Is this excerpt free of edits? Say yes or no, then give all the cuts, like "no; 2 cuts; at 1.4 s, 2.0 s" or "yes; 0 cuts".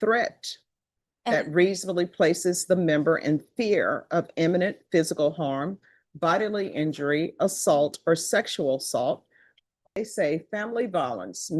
no; 1 cut; at 10.0 s